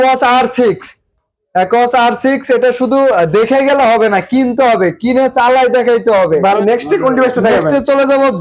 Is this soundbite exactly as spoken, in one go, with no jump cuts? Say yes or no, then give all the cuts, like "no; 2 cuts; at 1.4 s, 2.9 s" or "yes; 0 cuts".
no; 1 cut; at 6.6 s